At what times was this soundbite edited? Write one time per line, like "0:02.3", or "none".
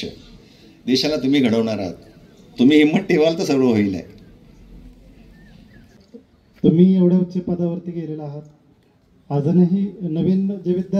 none